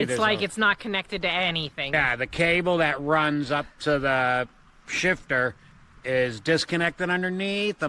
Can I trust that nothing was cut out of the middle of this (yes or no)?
no